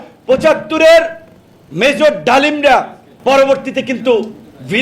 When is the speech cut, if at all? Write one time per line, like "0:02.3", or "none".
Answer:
0:03.0